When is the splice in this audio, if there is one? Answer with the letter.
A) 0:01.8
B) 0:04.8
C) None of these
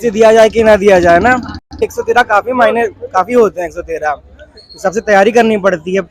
A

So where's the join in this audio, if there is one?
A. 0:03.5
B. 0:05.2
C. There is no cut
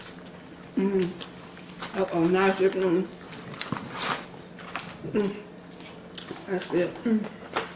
C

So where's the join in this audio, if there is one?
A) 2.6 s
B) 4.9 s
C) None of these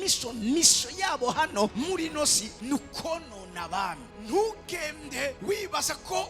A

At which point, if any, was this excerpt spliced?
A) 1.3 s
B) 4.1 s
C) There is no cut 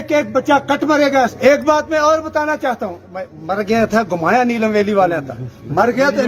A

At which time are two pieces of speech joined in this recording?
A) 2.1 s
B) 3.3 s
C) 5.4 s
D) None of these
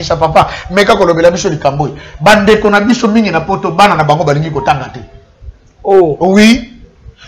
D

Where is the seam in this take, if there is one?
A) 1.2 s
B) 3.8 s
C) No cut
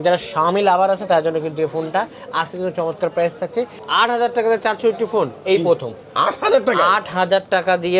B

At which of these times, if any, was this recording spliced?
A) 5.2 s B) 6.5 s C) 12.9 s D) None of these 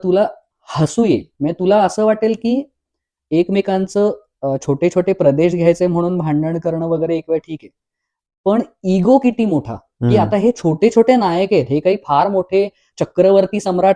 C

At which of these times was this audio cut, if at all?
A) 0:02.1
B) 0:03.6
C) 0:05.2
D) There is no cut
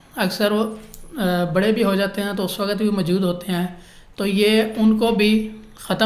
D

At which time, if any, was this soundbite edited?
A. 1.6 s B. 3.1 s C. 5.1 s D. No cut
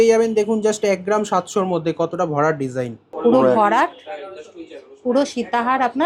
B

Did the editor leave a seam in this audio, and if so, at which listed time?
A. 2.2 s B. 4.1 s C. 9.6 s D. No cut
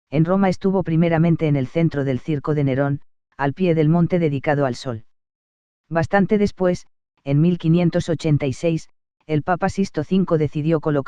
A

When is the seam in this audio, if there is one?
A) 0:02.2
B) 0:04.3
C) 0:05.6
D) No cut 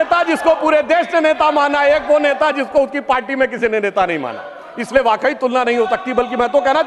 D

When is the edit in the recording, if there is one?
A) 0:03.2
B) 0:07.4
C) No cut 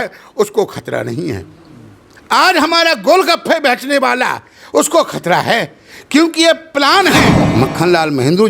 B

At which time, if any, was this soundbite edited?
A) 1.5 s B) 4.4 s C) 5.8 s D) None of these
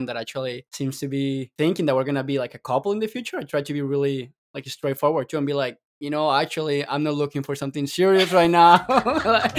D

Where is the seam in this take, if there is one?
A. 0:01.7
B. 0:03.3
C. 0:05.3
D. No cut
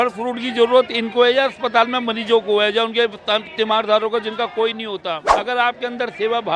C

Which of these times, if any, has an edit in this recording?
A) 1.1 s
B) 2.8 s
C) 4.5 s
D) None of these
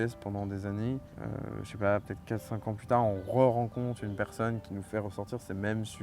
A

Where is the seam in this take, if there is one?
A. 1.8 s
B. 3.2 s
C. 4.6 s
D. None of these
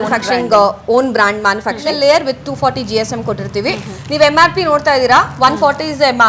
A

